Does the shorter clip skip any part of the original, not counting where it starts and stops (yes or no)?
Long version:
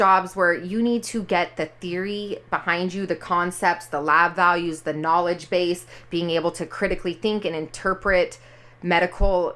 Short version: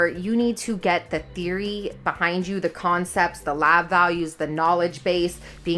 no